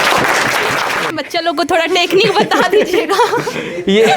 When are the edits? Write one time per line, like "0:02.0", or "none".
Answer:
0:01.1